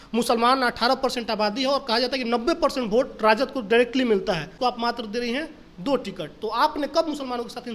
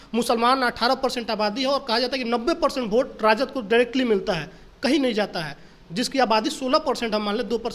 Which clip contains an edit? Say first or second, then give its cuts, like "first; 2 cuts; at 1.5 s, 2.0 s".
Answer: first; 1 cut; at 4.5 s